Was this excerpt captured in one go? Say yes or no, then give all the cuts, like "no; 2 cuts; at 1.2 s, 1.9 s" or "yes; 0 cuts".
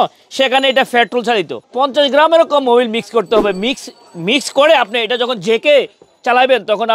no; 1 cut; at 1.6 s